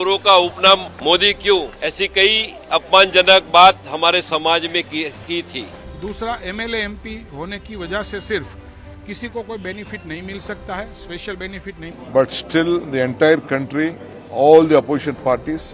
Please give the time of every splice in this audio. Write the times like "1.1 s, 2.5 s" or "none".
0.9 s, 1.7 s, 5.8 s, 11.9 s